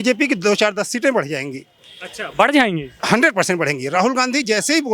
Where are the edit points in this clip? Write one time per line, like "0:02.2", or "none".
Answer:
none